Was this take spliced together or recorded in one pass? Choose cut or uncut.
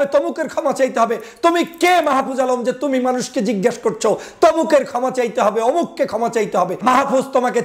cut